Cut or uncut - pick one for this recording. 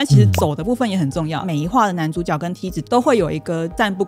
cut